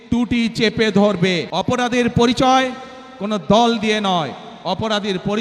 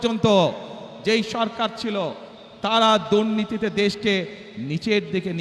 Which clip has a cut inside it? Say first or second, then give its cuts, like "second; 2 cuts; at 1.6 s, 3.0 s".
first; 1 cut; at 1.5 s